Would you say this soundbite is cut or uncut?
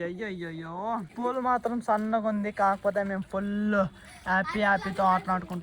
cut